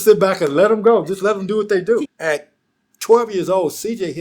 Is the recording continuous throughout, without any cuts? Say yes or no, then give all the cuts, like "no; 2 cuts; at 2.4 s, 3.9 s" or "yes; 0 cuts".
no; 1 cut; at 2.1 s